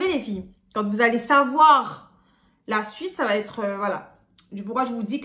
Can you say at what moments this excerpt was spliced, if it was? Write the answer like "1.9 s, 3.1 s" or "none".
none